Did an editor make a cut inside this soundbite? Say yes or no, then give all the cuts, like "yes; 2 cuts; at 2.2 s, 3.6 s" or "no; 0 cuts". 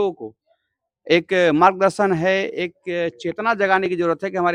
no; 0 cuts